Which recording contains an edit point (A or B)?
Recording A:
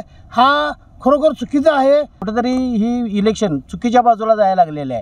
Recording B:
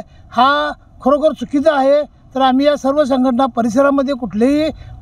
A